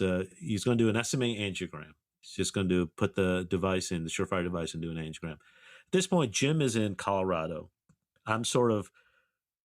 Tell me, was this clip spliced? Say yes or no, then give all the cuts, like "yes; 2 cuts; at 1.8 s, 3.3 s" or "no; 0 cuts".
no; 0 cuts